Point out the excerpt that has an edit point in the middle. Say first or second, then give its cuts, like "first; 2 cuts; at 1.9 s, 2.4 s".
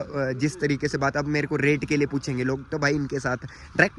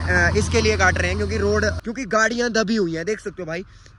second; 1 cut; at 1.8 s